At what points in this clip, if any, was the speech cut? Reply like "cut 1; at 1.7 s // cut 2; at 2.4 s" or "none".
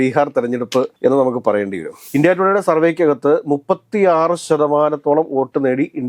cut 1; at 2.0 s